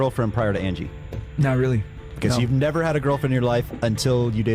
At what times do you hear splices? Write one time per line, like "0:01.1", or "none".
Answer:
none